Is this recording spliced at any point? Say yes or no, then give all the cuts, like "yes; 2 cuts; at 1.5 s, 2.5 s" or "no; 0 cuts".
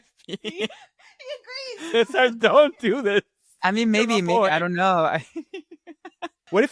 no; 0 cuts